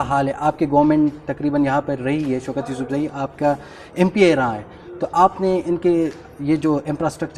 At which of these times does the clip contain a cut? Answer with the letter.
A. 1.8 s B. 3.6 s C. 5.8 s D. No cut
D